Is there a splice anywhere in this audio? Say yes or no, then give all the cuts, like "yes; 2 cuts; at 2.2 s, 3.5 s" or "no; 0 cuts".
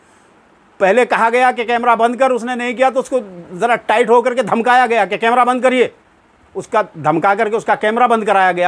no; 0 cuts